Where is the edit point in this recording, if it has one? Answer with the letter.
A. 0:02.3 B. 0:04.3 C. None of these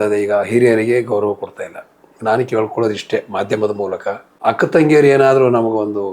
B